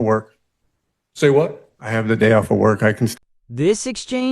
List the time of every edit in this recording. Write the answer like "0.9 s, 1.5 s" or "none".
3.2 s